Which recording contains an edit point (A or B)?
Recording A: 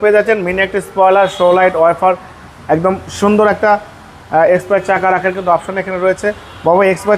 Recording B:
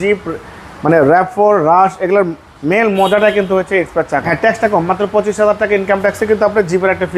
B